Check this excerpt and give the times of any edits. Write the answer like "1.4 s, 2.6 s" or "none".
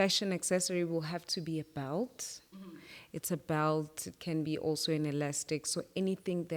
none